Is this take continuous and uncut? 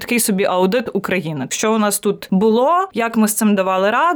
no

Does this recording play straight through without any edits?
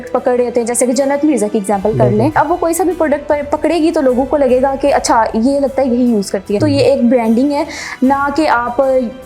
no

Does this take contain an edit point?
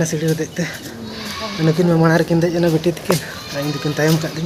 no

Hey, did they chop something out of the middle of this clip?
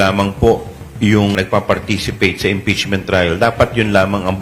yes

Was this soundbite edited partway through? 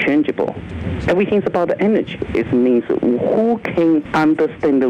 yes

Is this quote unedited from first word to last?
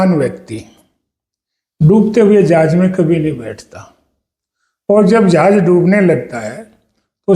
yes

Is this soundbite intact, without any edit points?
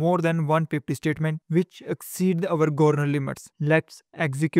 yes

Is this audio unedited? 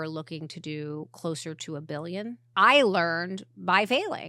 no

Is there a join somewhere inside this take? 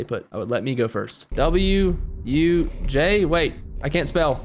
yes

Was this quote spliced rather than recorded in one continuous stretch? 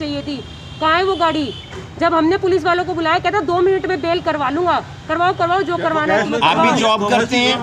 no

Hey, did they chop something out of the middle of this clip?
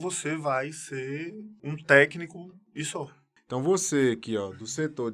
yes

